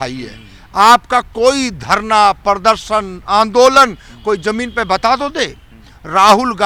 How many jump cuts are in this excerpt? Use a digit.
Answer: 0